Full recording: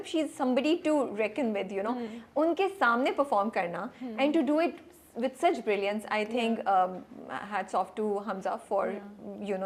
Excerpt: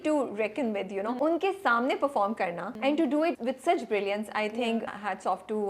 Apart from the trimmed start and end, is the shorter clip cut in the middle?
yes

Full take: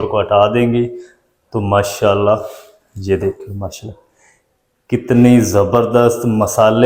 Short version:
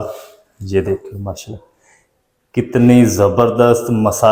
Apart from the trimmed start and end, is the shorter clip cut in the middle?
no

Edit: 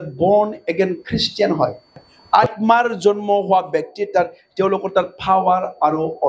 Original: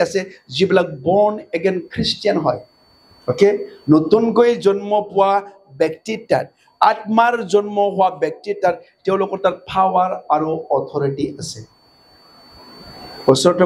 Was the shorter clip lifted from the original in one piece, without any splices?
no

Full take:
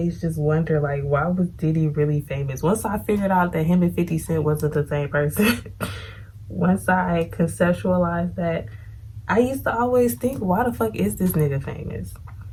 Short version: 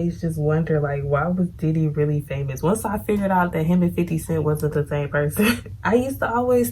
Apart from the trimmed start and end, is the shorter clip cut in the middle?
yes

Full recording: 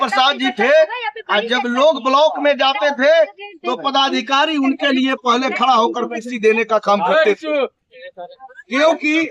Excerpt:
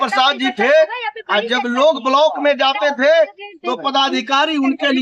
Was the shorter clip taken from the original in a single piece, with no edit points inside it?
yes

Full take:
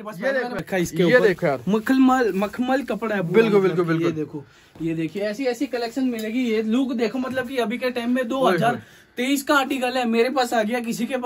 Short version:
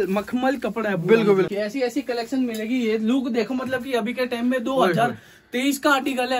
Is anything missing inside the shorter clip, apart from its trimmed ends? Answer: yes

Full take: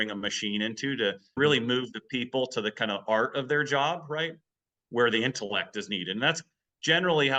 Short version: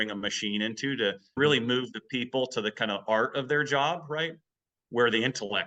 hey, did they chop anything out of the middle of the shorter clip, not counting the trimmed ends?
no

